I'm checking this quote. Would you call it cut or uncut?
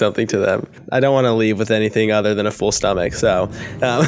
uncut